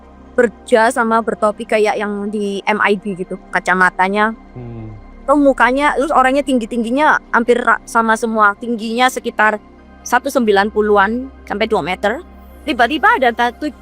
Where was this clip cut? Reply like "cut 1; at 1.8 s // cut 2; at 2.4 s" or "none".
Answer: cut 1; at 12.3 s

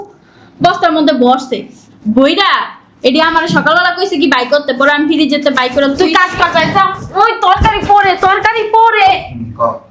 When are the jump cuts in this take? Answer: none

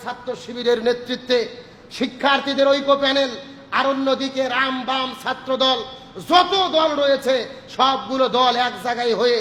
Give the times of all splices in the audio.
none

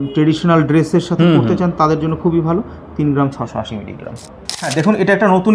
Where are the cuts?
none

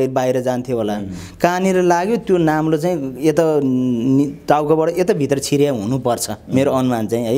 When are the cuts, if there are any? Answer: none

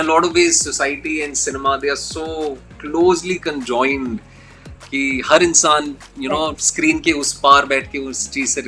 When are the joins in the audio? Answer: none

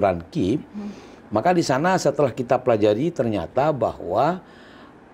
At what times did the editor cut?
none

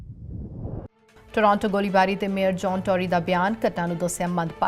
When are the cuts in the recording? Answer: cut 1; at 0.9 s

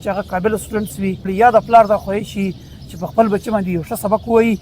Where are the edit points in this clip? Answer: cut 1; at 1.2 s

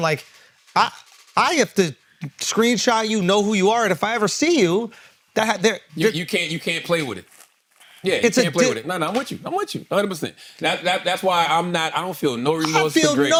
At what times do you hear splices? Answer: none

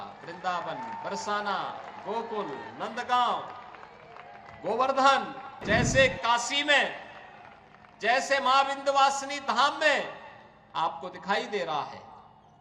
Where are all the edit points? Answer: cut 1; at 5.5 s

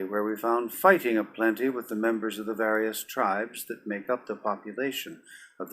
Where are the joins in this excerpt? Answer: cut 1; at 1.2 s

